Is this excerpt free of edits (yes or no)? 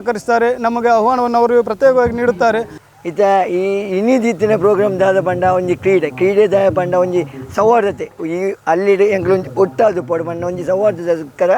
no